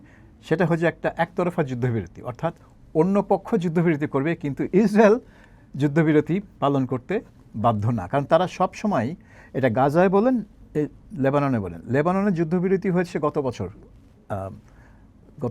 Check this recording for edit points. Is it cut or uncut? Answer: uncut